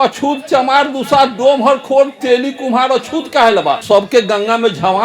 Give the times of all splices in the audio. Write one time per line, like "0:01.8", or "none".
0:03.8